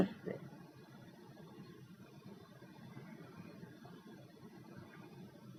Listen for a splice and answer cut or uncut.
uncut